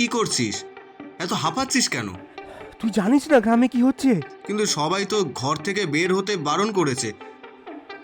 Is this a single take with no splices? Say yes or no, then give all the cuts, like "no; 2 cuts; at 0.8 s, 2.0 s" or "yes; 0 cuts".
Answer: no; 1 cut; at 4.4 s